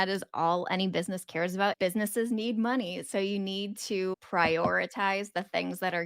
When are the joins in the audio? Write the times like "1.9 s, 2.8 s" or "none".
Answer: 1.7 s